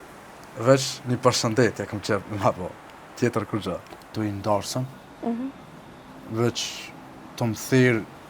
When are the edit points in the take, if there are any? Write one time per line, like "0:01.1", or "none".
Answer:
0:04.1